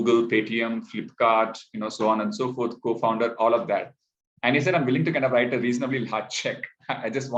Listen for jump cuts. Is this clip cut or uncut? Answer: uncut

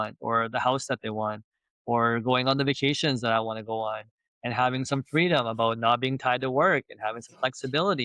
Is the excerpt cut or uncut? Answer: uncut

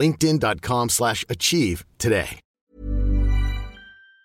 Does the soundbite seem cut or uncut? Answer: uncut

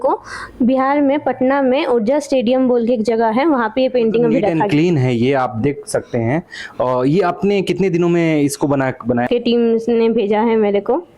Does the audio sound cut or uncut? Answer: cut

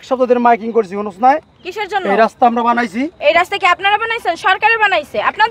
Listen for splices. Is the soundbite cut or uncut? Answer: cut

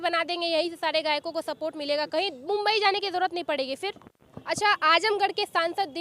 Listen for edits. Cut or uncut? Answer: cut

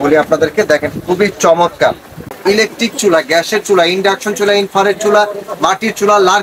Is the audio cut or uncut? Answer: cut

